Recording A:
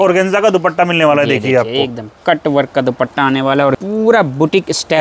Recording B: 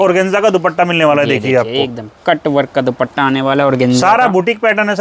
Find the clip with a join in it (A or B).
A